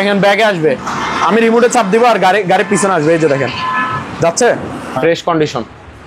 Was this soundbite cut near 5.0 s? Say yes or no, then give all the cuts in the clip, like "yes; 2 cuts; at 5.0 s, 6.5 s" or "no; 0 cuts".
yes; 1 cut; at 5.0 s